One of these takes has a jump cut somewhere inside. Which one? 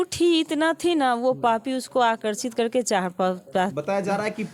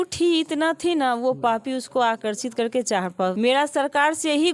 second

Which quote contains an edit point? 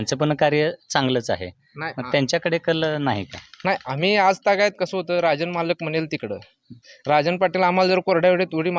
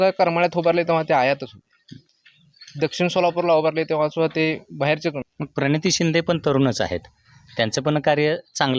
second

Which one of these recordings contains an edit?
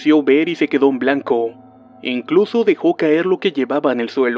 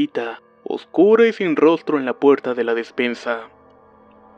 first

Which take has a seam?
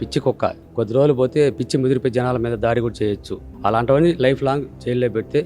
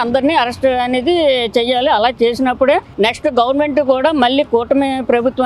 first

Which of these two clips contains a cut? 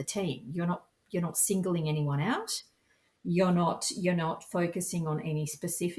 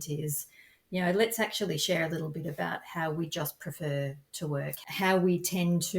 second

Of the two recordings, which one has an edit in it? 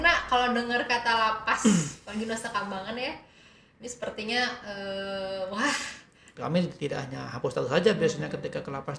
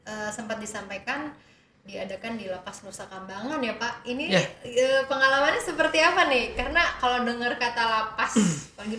first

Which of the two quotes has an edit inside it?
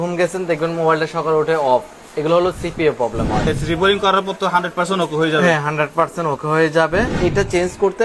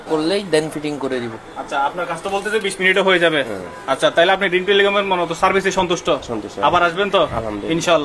first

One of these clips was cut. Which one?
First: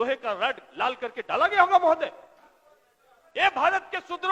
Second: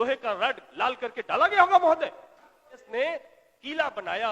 second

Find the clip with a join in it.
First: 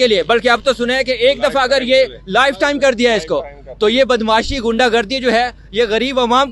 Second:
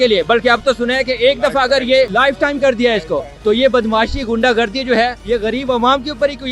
second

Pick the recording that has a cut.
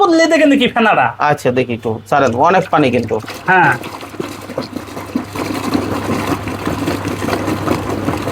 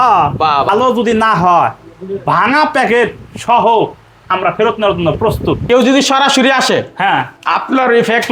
second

